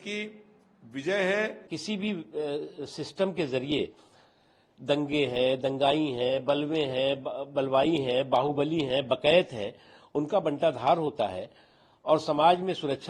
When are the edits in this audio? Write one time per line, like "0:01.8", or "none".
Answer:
0:01.7